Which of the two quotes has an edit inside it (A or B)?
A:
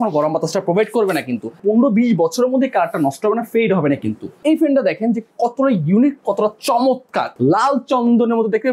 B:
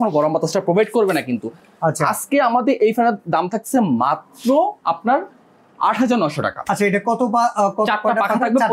A